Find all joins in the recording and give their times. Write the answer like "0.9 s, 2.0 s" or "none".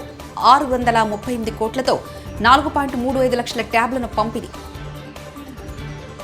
none